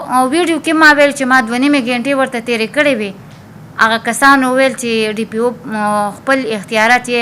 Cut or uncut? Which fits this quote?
uncut